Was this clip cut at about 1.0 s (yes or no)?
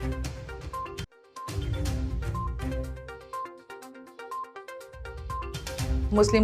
yes